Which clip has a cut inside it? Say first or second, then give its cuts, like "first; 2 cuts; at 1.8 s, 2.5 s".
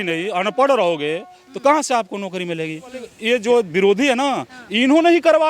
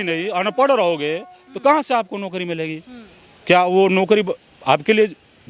first; 1 cut; at 3.1 s